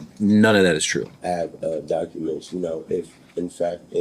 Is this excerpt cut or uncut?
cut